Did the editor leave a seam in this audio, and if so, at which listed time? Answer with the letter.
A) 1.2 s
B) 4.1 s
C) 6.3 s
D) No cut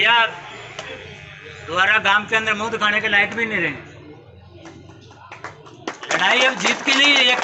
D